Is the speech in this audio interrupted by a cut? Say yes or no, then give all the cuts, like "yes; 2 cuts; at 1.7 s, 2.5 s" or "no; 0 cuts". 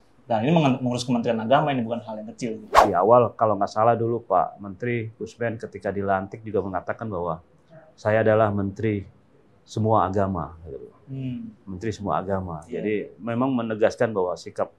yes; 1 cut; at 2.7 s